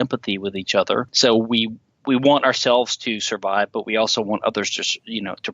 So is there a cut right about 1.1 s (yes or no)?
yes